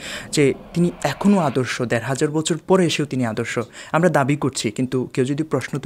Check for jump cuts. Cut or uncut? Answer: uncut